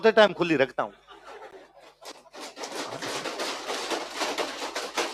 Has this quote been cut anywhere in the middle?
no; 0 cuts

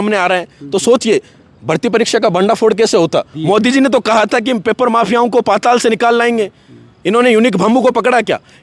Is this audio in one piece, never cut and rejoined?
no; 1 cut; at 3.3 s

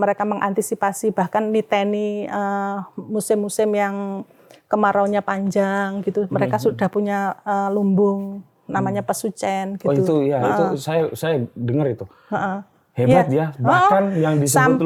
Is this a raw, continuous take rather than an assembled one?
yes; 0 cuts

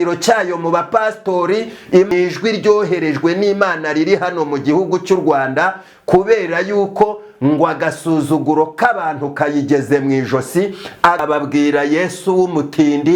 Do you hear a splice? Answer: yes; 2 cuts; at 2.1 s, 11.2 s

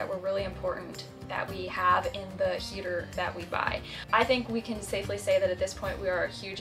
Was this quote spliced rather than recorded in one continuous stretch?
yes; 1 cut; at 4.0 s

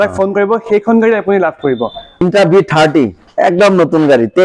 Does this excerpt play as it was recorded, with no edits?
no; 1 cut; at 2.2 s

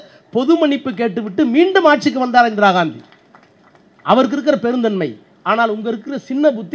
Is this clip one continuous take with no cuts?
yes; 0 cuts

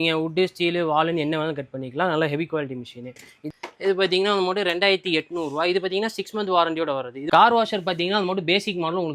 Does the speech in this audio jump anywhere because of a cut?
yes; 2 cuts; at 3.3 s, 7.2 s

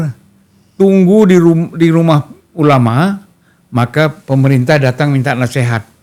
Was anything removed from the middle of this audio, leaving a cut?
no; 0 cuts

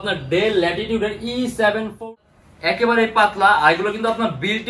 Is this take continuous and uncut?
no; 1 cut; at 2.0 s

